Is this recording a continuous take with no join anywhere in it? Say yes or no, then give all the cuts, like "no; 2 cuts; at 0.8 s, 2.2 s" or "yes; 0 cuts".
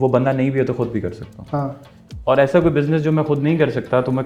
yes; 0 cuts